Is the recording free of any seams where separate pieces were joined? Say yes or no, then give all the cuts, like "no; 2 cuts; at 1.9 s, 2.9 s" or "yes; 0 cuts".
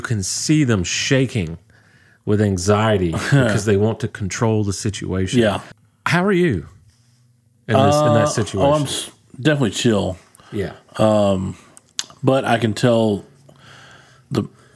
no; 1 cut; at 5.7 s